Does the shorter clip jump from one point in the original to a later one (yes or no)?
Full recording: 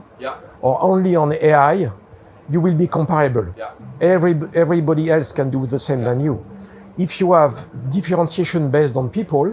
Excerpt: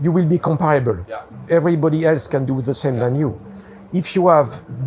yes